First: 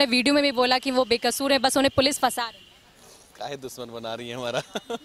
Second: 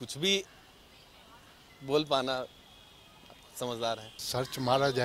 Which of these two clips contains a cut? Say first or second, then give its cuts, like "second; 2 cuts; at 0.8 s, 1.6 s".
second; 1 cut; at 4.1 s